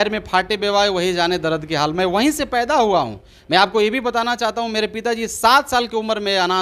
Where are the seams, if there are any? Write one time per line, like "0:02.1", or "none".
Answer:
none